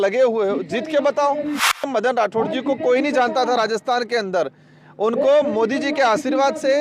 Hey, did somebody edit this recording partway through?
yes; 1 cut; at 1.8 s

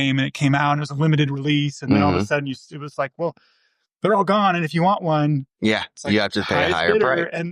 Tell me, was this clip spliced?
no; 0 cuts

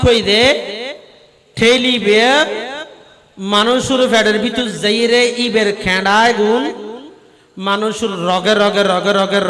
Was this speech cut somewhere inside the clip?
no; 0 cuts

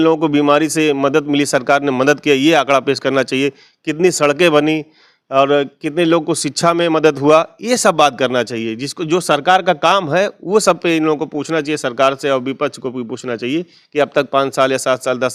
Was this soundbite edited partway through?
no; 0 cuts

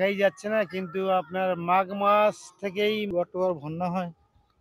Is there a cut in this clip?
yes; 1 cut; at 3.1 s

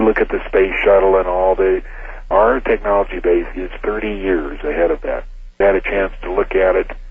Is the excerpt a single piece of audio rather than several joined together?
no; 2 cuts; at 2.2 s, 5.6 s

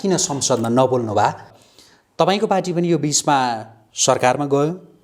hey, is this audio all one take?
no; 1 cut; at 1.5 s

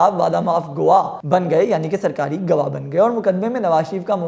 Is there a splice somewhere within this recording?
yes; 1 cut; at 1.2 s

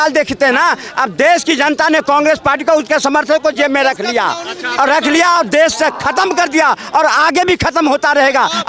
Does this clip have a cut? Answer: no; 0 cuts

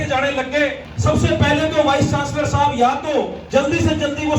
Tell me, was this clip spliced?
yes; 2 cuts; at 0.9 s, 3.4 s

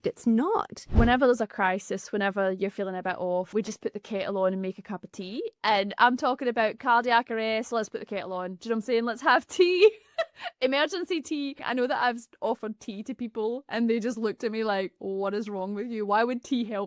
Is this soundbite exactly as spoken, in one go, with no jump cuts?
no; 3 cuts; at 0.9 s, 3.5 s, 11.6 s

